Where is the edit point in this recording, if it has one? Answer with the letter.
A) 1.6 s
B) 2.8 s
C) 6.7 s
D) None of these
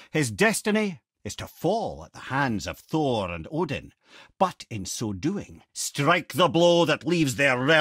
D